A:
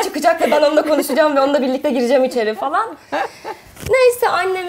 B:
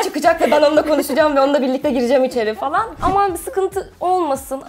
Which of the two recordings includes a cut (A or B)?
B